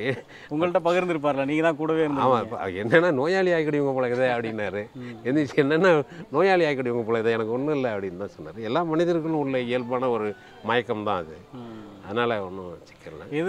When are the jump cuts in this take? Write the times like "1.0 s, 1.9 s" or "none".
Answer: none